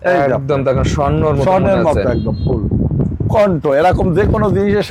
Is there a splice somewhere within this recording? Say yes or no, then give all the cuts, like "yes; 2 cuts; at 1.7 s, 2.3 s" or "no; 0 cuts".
no; 0 cuts